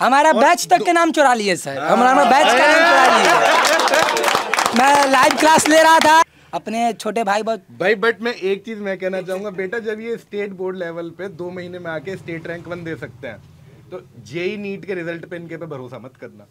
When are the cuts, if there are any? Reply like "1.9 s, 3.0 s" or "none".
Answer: 6.3 s